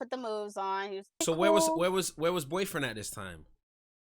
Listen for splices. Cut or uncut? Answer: cut